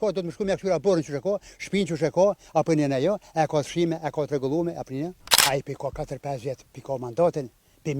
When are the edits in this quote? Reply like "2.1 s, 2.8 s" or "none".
5.2 s